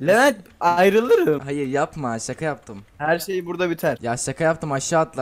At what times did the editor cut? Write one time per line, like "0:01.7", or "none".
0:01.4
0:04.0